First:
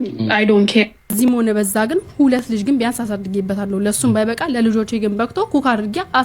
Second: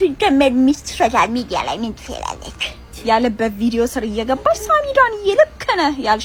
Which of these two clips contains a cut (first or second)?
first